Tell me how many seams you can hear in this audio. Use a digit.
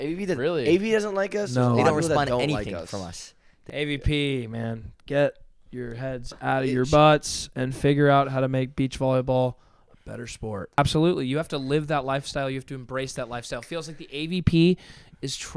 2